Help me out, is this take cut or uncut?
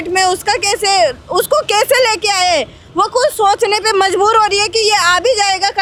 uncut